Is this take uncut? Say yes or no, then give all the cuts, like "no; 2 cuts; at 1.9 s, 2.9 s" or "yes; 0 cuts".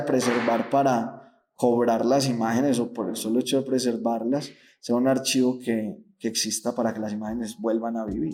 yes; 0 cuts